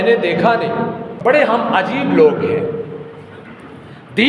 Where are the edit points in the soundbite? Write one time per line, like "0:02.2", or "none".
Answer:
0:01.1